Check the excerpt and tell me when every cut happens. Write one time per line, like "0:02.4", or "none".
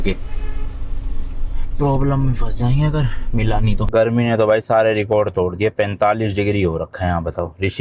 0:03.8